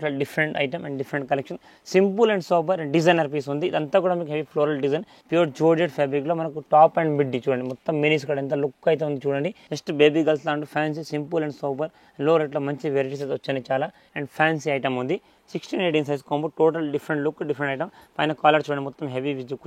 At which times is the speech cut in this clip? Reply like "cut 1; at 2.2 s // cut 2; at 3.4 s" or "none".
cut 1; at 5.1 s // cut 2; at 9.6 s // cut 3; at 14.0 s